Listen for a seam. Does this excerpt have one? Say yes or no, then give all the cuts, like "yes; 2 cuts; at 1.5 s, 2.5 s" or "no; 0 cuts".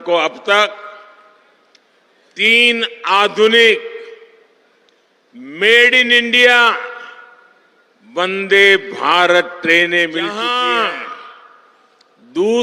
yes; 1 cut; at 10.4 s